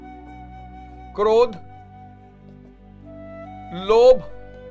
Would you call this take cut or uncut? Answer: cut